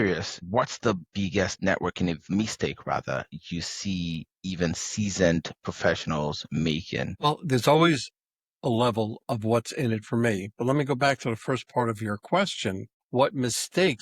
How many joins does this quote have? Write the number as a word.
two